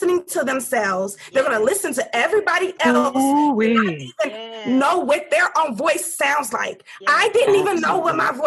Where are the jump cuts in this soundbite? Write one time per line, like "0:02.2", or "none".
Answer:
none